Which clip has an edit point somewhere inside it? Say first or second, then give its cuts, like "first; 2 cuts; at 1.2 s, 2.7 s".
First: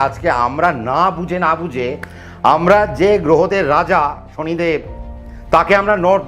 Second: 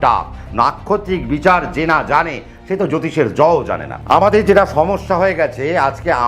second; 1 cut; at 4.0 s